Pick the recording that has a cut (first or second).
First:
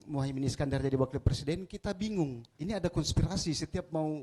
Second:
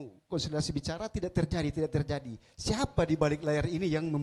first